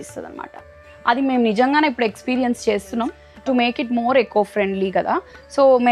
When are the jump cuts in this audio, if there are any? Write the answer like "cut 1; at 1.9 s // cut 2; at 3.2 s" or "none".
cut 1; at 3.2 s